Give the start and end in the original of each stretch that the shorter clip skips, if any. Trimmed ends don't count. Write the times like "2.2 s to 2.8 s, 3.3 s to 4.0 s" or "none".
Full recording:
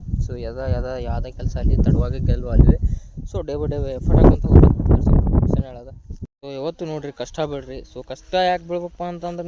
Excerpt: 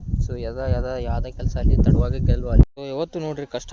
2.6 s to 6.3 s